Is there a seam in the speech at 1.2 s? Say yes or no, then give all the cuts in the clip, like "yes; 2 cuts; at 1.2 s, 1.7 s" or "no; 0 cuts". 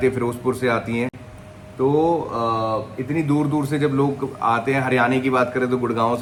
no; 0 cuts